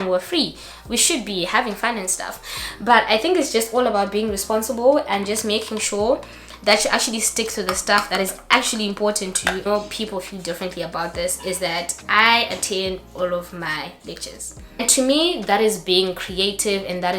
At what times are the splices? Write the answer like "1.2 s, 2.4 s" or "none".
9.6 s, 14.8 s